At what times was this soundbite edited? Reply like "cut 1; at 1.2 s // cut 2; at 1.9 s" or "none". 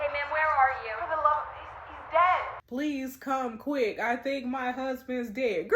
cut 1; at 2.6 s